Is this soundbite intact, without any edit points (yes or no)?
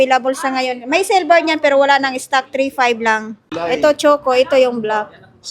no